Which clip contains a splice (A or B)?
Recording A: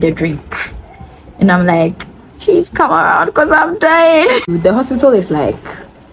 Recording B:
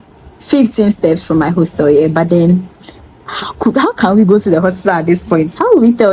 A